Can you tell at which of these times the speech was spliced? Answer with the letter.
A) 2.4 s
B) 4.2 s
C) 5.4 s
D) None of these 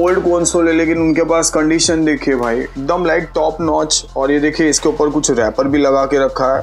D